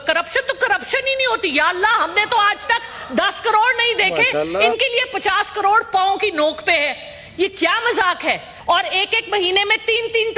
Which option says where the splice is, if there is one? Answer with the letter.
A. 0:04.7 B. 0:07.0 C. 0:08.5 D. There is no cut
C